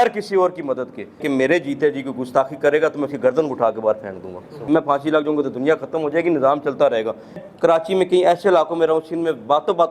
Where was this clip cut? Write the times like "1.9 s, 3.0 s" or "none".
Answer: 1.2 s, 4.5 s, 7.5 s